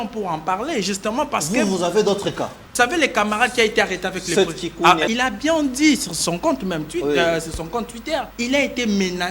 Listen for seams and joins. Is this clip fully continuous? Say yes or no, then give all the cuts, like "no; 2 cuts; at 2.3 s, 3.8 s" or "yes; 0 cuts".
no; 3 cuts; at 2.6 s, 5.1 s, 8.3 s